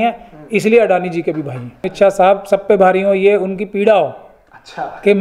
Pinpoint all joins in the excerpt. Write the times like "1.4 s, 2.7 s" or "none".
1.9 s